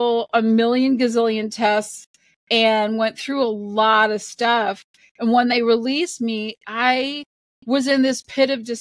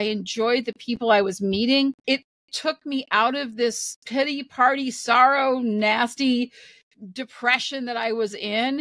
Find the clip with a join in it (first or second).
second